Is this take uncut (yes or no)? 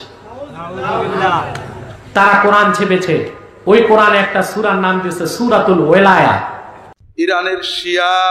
no